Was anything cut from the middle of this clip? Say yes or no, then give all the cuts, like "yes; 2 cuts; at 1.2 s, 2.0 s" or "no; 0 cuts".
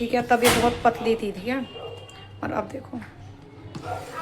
no; 0 cuts